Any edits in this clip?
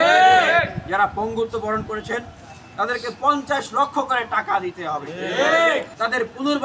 no; 0 cuts

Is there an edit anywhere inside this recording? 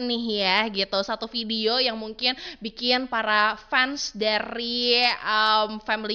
no; 0 cuts

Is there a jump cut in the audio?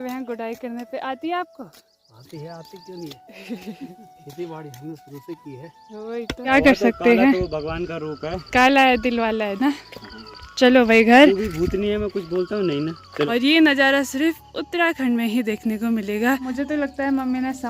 yes; 3 cuts; at 6.5 s, 13.3 s, 16.5 s

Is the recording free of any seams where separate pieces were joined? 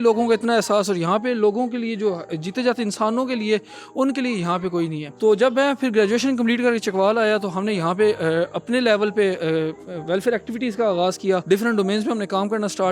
no; 3 cuts; at 5.0 s, 9.9 s, 11.4 s

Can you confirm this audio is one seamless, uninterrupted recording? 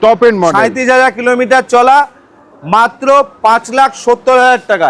yes; 0 cuts

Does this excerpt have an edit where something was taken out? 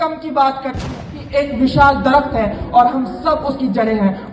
yes; 1 cut; at 1.1 s

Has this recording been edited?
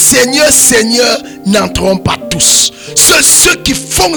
no; 0 cuts

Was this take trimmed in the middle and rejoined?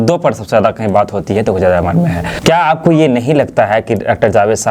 yes; 1 cut; at 2.2 s

